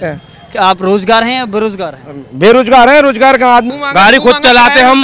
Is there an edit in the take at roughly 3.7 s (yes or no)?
yes